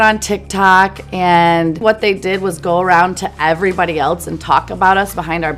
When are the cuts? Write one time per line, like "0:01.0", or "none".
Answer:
0:01.8